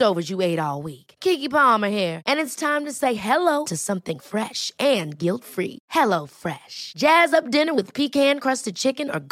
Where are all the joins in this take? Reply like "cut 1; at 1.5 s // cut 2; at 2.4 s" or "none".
none